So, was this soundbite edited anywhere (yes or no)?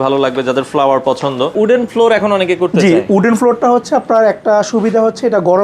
yes